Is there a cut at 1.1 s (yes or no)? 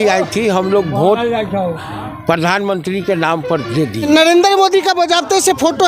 no